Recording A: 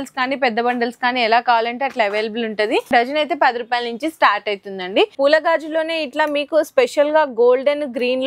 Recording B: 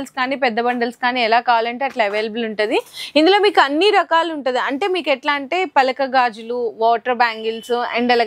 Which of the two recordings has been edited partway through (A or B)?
A